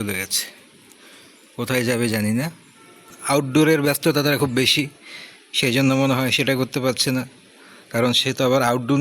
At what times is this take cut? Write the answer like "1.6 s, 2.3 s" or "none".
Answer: 3.1 s